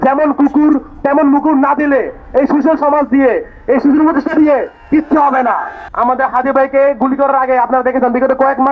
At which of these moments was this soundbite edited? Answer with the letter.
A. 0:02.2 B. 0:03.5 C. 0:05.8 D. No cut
C